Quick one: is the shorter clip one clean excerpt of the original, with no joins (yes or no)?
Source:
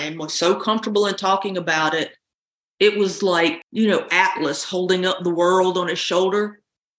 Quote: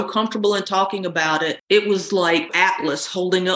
no